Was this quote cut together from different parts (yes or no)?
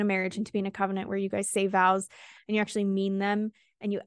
no